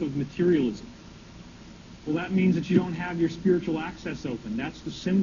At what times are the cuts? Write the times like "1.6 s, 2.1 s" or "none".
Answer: none